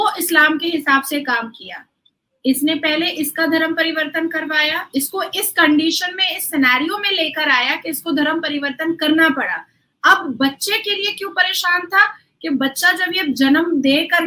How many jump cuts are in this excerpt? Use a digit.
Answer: 0